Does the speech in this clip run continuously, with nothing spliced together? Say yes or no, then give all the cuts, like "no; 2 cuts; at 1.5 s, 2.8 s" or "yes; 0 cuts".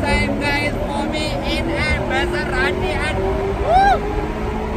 yes; 0 cuts